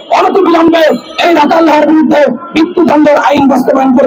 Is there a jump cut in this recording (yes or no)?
no